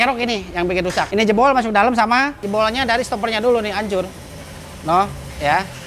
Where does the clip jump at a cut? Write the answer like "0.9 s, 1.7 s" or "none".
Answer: 2.4 s

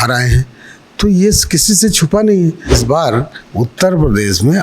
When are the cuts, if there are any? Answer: 2.8 s

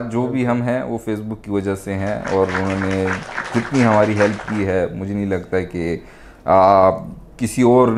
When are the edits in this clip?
none

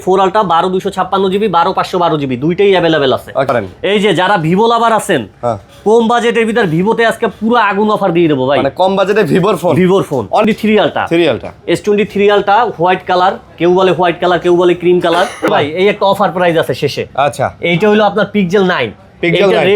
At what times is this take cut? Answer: 3.5 s, 10.4 s, 15.5 s

